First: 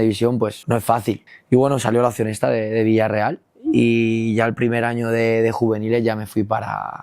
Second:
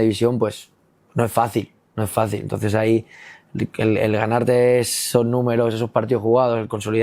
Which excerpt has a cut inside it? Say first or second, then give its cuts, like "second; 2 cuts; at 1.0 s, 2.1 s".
first; 1 cut; at 0.9 s